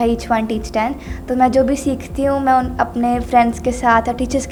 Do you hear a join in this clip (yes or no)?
no